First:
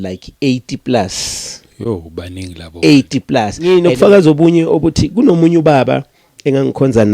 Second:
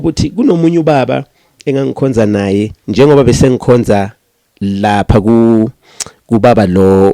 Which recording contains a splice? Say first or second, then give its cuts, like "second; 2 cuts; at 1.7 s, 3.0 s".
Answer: first; 1 cut; at 3.7 s